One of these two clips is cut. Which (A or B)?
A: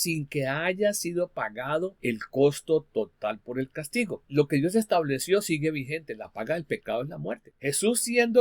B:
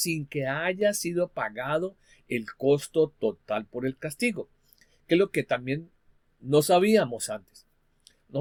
A